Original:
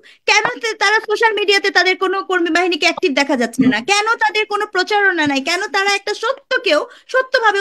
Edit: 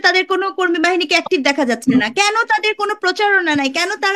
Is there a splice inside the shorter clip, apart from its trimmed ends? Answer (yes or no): no